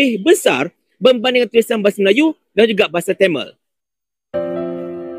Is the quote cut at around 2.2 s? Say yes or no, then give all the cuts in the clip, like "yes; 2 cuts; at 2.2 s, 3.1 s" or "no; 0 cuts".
no; 1 cut; at 3.6 s